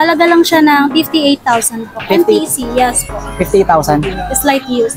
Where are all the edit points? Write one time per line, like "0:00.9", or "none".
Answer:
none